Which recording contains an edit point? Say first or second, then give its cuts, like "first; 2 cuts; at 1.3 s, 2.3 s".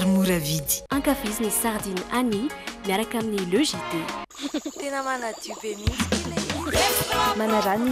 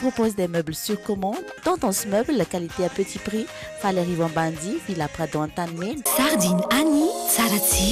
second; 1 cut; at 6.0 s